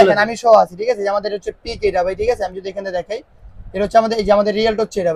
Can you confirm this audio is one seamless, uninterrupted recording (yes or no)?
yes